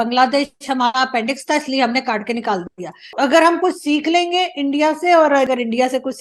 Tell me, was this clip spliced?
yes; 2 cuts; at 3.1 s, 5.5 s

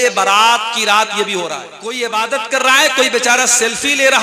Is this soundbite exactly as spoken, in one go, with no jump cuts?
no; 1 cut; at 1.8 s

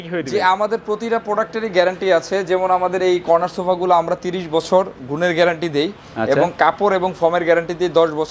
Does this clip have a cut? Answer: no; 0 cuts

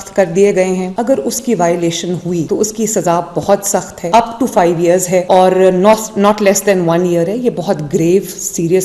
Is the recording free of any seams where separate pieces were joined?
no; 1 cut; at 0.9 s

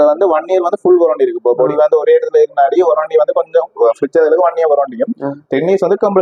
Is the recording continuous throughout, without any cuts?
yes; 0 cuts

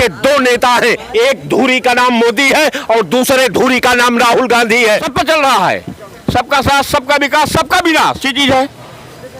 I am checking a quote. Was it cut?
yes; 2 cuts; at 5.1 s, 8.2 s

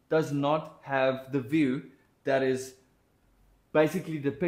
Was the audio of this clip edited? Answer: no; 0 cuts

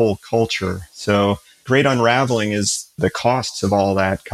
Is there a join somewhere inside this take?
no; 0 cuts

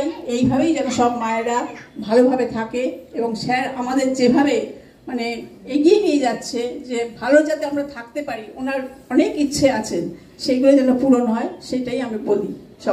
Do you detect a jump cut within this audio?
no; 0 cuts

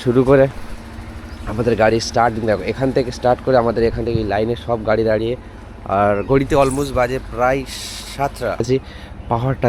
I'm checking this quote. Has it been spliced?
yes; 1 cut; at 8.6 s

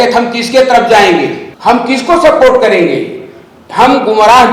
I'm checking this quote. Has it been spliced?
yes; 1 cut; at 1.4 s

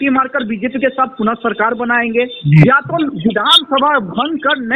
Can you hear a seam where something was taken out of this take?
no; 0 cuts

